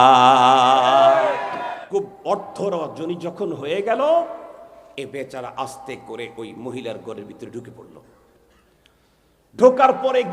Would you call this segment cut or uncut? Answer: cut